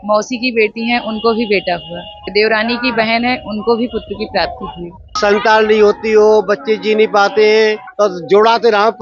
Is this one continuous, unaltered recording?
no; 3 cuts; at 2.2 s, 5.2 s, 7.8 s

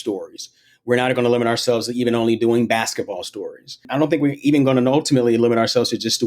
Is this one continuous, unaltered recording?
no; 1 cut; at 3.9 s

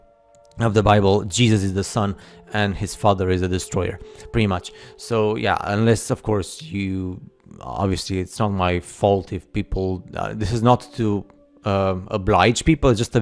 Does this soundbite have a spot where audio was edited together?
no; 0 cuts

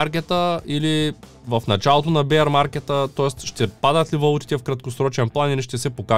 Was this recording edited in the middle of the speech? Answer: no; 0 cuts

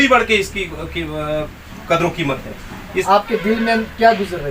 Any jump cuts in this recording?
yes; 1 cut; at 3.0 s

